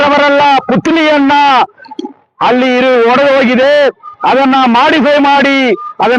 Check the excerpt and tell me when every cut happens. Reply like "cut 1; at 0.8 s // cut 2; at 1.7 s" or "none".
none